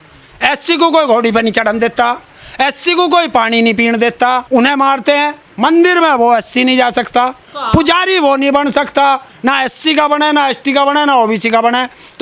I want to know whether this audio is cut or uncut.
cut